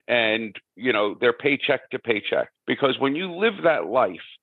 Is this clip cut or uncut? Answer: cut